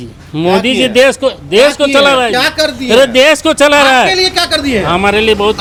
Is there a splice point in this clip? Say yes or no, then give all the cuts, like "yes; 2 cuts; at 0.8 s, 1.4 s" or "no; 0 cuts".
no; 0 cuts